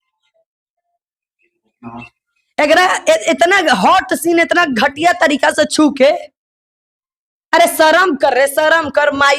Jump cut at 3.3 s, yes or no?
no